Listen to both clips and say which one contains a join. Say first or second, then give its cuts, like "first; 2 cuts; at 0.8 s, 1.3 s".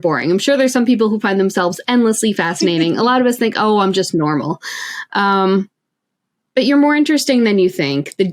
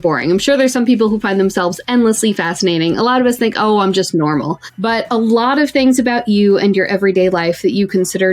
second; 1 cut; at 4.7 s